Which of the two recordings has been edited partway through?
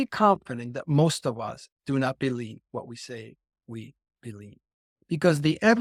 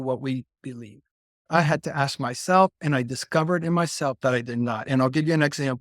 second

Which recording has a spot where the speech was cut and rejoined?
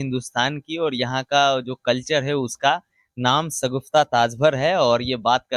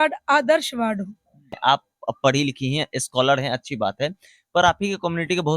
second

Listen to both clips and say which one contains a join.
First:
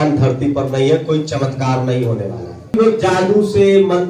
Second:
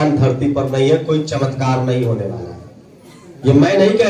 first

